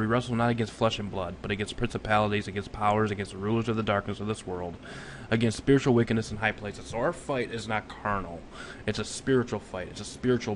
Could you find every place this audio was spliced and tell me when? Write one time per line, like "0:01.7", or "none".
0:02.4